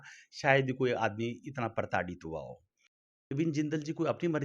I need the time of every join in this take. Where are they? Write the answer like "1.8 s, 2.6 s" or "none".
3.2 s